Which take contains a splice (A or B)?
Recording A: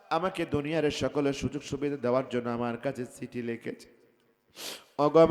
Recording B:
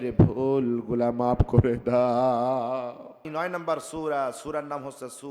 B